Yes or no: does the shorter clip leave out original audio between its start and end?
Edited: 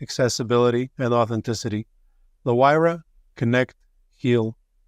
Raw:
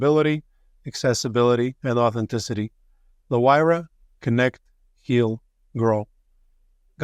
no